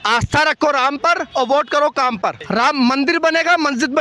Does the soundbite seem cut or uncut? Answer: cut